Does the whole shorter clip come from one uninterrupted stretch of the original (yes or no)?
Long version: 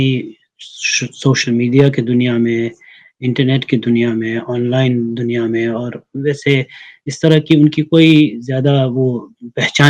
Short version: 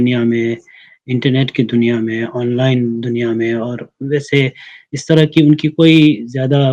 yes